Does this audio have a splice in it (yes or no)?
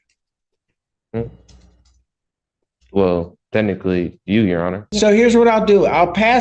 yes